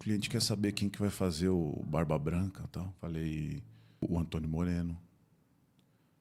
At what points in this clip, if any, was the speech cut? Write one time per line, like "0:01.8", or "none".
0:02.9
0:04.0